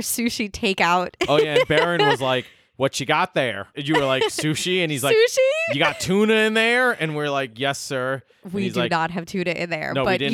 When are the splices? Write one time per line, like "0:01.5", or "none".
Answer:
0:03.7

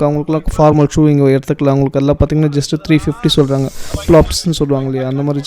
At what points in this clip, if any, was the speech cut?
0:03.9

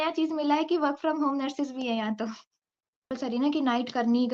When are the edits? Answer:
0:03.1

